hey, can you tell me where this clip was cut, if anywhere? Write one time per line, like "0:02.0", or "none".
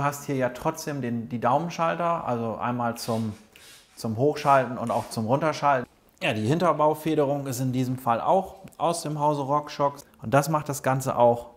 0:05.9
0:10.0